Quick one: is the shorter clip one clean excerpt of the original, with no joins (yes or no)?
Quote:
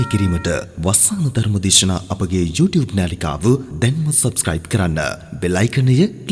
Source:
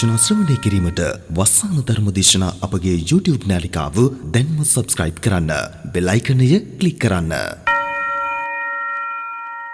yes